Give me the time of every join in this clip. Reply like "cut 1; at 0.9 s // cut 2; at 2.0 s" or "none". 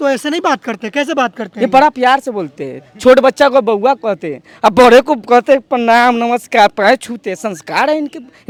none